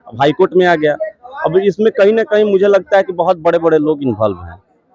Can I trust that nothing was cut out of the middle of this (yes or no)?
yes